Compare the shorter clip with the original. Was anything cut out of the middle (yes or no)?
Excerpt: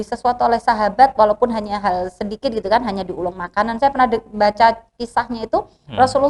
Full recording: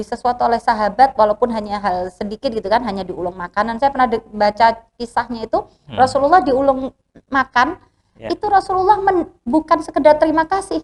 no